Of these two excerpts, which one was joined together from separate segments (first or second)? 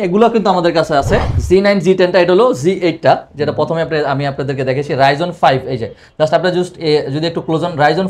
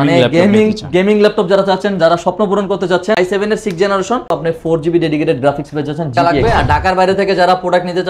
second